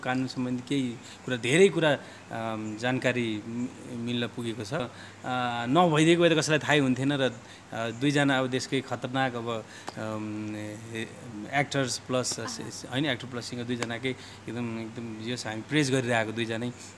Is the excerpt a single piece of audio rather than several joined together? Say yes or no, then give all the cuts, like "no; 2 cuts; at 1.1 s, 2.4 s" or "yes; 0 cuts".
no; 1 cut; at 4.9 s